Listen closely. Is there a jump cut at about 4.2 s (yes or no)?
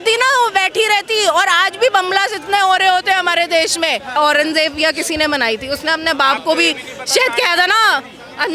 yes